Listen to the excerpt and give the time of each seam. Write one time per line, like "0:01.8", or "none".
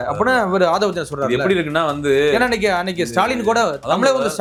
none